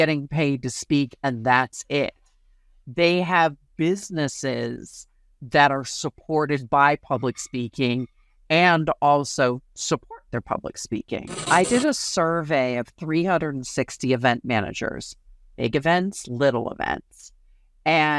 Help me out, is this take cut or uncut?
cut